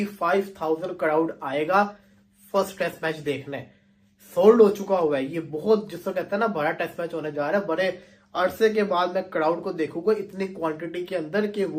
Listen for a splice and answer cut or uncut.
uncut